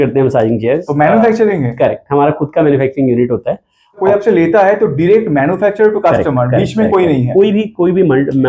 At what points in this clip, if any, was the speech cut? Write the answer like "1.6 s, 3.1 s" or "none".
4.0 s